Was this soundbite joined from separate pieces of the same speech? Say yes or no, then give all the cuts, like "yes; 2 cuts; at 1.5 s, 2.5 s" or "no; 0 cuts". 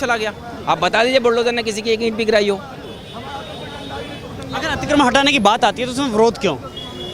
no; 0 cuts